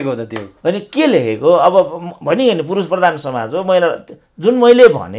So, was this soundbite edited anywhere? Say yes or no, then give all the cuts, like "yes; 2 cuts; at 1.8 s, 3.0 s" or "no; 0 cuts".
no; 0 cuts